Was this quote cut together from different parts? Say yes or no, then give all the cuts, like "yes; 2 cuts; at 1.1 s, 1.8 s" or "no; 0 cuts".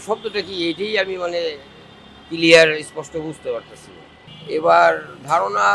no; 0 cuts